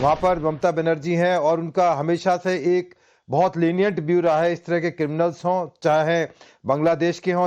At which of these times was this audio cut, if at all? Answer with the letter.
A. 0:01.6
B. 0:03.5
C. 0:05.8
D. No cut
A